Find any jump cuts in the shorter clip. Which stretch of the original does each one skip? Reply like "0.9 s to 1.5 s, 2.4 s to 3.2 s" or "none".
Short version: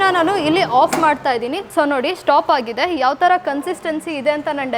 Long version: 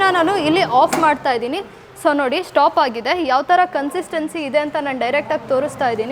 1.6 s to 1.9 s